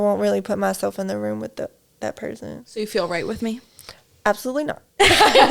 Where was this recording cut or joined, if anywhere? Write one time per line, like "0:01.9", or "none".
0:02.6